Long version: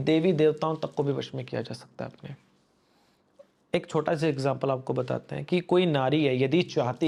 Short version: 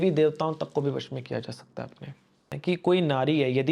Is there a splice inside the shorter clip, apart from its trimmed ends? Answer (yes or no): yes